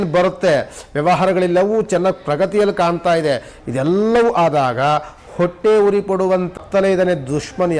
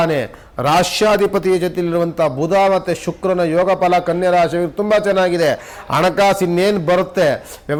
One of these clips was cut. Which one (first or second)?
first